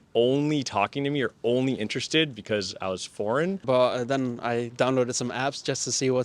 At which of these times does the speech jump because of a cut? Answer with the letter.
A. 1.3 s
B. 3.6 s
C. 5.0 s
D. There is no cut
B